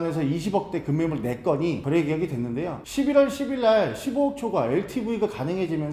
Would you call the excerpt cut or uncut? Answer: uncut